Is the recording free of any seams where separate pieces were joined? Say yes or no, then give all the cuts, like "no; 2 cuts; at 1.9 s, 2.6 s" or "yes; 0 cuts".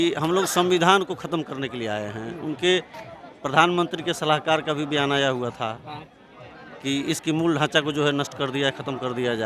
yes; 0 cuts